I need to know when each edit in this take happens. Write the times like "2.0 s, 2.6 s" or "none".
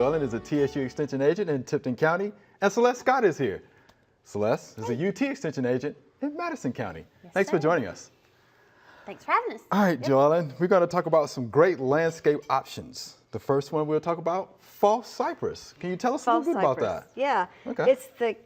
8.2 s